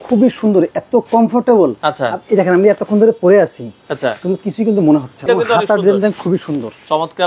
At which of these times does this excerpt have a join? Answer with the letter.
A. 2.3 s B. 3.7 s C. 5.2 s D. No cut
C